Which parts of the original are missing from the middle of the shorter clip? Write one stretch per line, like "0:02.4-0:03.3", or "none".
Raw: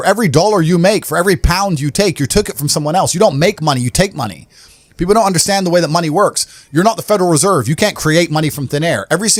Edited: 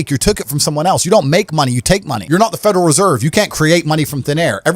0:04.2-0:06.6